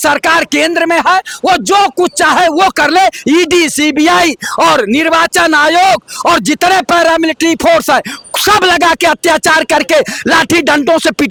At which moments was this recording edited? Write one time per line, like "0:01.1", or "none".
none